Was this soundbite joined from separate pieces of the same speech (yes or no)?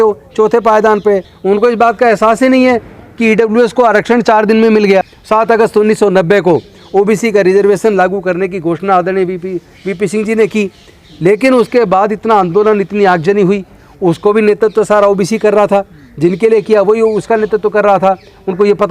yes